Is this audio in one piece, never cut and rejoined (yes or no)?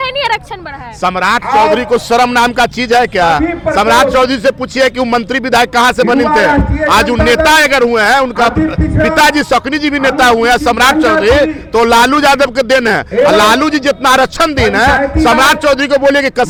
yes